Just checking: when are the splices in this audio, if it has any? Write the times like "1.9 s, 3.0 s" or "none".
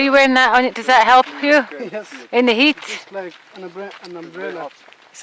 none